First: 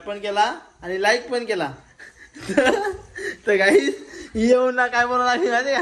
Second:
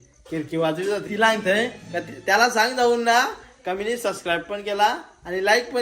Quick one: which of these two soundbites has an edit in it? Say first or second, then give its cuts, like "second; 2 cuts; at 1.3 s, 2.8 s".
second; 1 cut; at 1.1 s